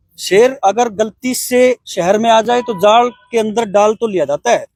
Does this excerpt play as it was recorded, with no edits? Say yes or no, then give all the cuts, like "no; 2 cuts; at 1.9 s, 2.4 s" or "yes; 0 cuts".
yes; 0 cuts